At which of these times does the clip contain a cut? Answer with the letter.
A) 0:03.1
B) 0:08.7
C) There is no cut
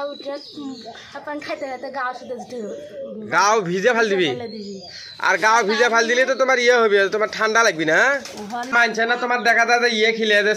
B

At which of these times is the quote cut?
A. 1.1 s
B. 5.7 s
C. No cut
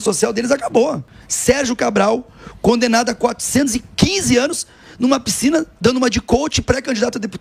A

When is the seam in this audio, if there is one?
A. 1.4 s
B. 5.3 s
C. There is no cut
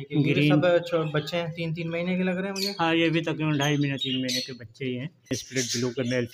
B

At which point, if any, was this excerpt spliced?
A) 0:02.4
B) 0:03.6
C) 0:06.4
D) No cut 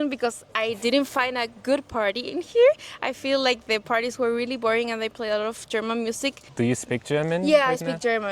C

